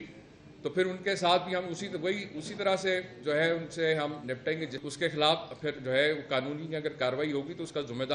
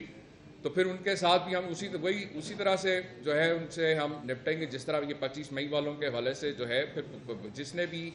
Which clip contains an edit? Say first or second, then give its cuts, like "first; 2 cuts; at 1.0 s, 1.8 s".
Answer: first; 1 cut; at 4.8 s